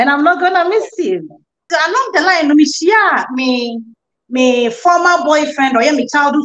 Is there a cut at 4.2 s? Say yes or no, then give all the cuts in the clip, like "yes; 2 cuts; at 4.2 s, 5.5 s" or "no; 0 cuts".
no; 1 cut; at 1.6 s